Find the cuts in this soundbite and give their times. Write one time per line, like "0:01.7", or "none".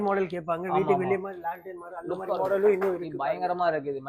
none